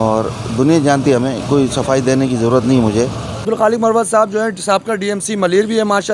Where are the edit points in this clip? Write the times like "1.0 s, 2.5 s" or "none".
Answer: 3.4 s

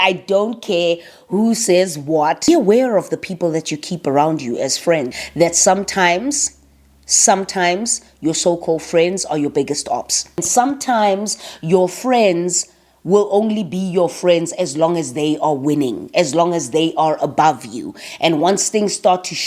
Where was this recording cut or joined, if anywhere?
2.5 s, 5.2 s, 10.5 s

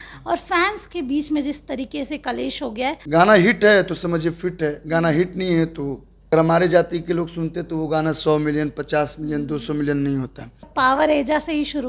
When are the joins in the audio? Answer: 3.0 s, 6.1 s, 10.7 s

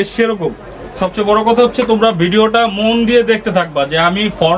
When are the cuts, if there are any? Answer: 1.0 s

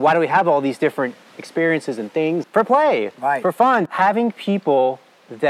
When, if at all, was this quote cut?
2.4 s, 3.9 s

